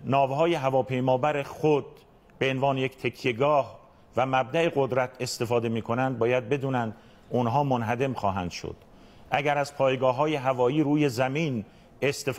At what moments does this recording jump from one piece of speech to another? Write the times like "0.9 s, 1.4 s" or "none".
1.9 s